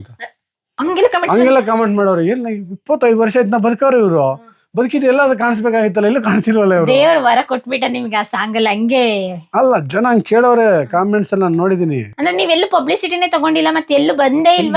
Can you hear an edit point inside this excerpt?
no; 0 cuts

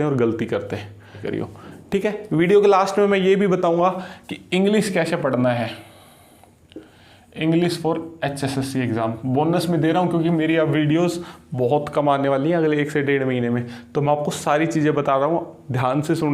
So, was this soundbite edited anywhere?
yes; 1 cut; at 1.2 s

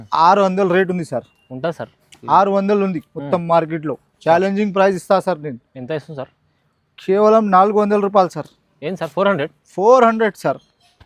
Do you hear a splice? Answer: no; 0 cuts

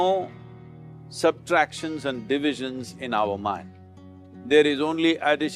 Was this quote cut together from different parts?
no; 0 cuts

